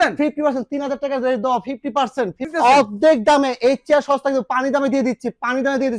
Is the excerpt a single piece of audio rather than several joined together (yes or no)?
no